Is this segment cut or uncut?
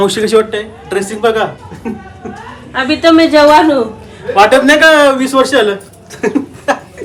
uncut